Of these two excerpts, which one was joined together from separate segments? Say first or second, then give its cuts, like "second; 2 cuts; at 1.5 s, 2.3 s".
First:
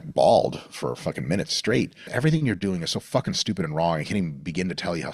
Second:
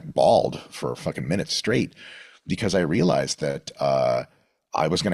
first; 1 cut; at 2.0 s